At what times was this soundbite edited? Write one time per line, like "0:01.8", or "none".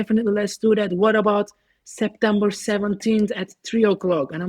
none